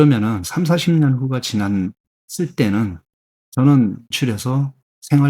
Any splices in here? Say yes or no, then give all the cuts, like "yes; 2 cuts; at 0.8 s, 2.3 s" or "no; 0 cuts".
yes; 1 cut; at 4.1 s